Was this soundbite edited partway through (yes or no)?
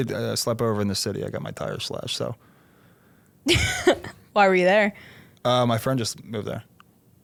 no